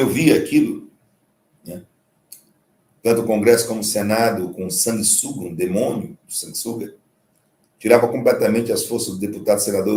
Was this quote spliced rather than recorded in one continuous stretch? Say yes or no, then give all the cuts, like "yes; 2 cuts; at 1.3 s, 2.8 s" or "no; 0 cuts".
no; 0 cuts